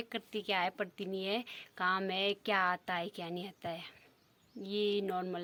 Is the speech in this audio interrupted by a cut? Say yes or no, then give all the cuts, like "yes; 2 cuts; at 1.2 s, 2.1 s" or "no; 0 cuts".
no; 0 cuts